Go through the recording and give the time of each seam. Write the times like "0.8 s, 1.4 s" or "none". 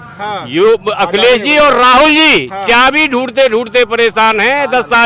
none